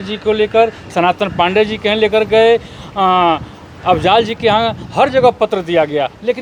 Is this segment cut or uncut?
uncut